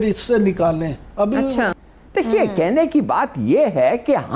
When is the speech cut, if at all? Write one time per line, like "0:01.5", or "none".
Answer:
0:01.7